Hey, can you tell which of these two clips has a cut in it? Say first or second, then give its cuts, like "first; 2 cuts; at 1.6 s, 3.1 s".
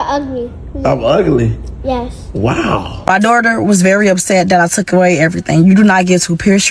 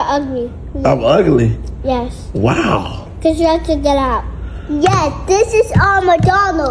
first; 1 cut; at 3.1 s